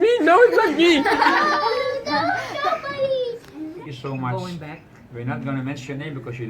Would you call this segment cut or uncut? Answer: cut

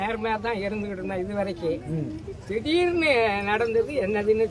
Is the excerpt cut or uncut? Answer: uncut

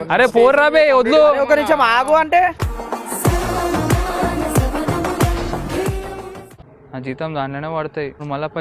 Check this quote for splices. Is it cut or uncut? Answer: cut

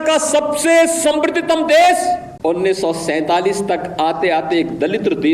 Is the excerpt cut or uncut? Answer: cut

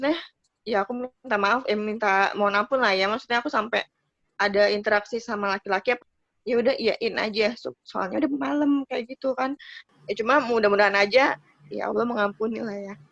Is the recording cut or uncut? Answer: cut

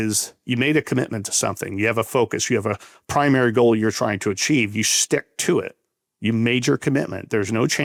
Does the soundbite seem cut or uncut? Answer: uncut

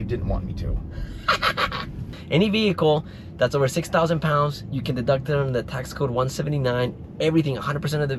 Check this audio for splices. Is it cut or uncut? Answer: cut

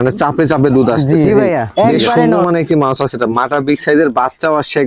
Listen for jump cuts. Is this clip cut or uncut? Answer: cut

